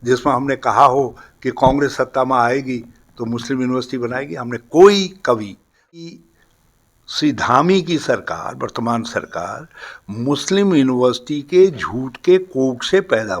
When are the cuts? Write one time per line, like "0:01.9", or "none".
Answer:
0:06.0